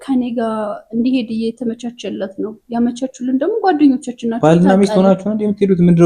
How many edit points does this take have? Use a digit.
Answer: 0